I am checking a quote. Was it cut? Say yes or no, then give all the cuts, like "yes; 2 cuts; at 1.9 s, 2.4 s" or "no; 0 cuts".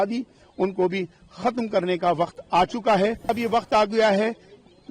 yes; 1 cut; at 3.3 s